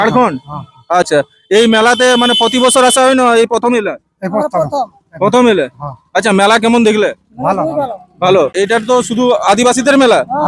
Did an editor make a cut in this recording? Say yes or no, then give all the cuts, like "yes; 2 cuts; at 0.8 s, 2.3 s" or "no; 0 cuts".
yes; 2 cuts; at 1.1 s, 8.8 s